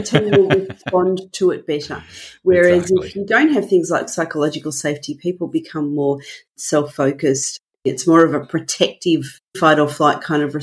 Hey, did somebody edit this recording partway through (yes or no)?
yes